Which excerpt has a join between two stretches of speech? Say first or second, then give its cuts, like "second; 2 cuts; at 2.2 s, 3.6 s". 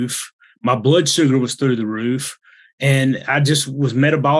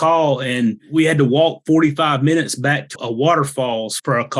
second; 2 cuts; at 0.8 s, 3.0 s